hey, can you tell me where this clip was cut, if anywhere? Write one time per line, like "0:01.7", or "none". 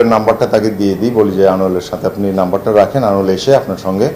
none